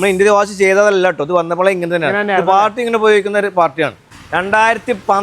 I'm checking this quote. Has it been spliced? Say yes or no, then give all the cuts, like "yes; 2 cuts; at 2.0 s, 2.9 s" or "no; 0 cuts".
yes; 1 cut; at 4.0 s